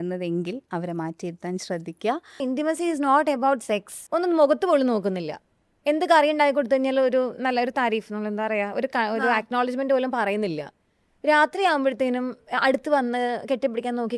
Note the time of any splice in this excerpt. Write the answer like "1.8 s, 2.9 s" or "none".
2.4 s, 3.9 s